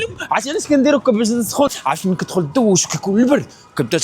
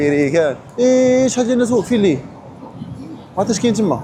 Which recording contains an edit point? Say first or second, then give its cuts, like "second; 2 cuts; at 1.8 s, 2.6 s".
first; 1 cut; at 1.7 s